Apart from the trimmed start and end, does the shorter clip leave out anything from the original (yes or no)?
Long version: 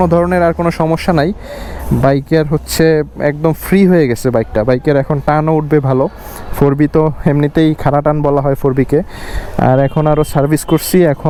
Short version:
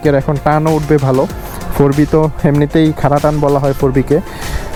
no